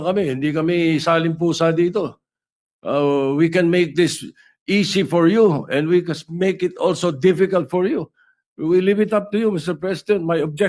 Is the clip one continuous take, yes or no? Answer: yes